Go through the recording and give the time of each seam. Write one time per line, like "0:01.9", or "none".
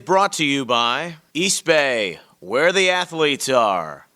none

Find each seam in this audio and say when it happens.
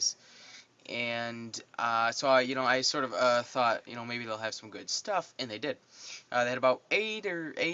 0:03.9

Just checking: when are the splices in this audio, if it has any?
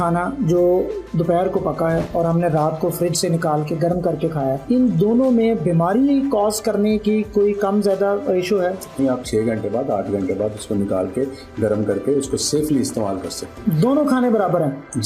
0:04.6
0:09.0
0:13.5

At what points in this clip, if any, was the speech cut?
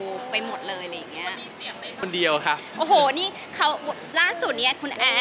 0:02.0

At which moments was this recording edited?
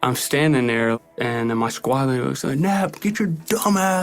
0:01.0

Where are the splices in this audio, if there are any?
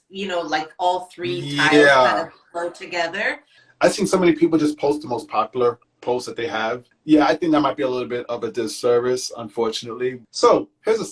0:03.3
0:06.9
0:10.2

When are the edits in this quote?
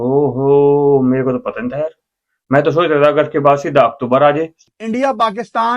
0:04.6

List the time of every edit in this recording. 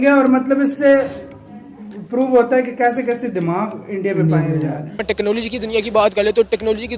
0:05.0

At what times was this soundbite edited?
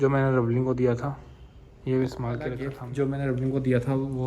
0:02.8

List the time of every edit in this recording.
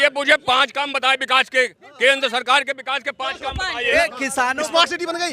0:03.9

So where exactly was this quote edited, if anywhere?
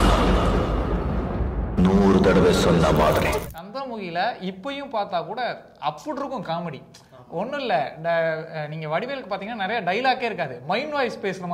0:03.5

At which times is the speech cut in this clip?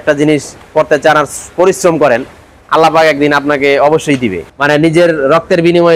0:04.4

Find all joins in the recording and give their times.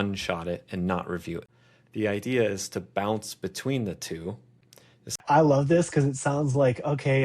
0:01.4
0:05.2

